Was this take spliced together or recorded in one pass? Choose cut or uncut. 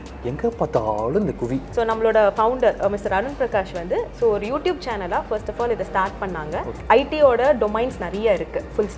cut